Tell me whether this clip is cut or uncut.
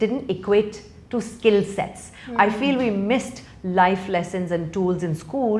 uncut